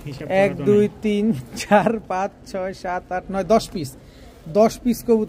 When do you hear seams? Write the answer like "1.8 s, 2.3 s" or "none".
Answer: none